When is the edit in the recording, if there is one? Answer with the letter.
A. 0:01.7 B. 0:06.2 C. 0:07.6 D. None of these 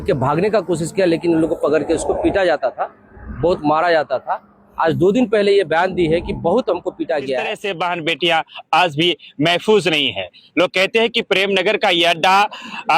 C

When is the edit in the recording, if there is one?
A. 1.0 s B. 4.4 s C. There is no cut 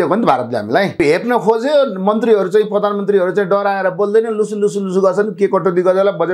A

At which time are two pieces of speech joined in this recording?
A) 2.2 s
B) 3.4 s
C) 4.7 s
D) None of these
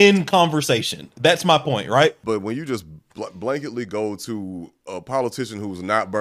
A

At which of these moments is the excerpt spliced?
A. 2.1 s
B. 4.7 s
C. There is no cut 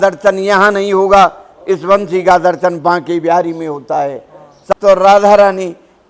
B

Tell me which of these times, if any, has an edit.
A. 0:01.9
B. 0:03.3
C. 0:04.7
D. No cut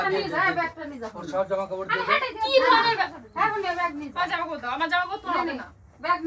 D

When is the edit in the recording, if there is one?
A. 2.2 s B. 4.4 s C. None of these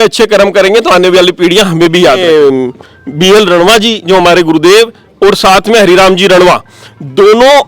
A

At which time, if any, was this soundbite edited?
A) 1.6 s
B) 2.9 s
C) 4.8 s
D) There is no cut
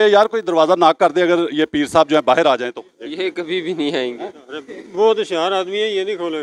D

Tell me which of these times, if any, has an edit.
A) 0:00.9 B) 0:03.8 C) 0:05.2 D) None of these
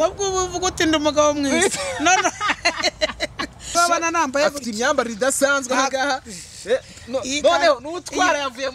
B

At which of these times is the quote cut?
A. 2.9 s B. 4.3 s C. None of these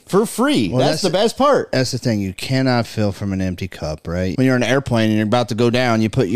B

